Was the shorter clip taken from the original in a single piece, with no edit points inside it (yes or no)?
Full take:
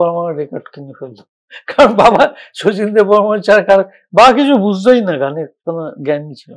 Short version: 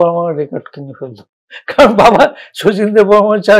yes